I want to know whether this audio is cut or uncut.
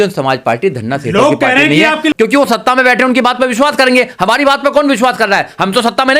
cut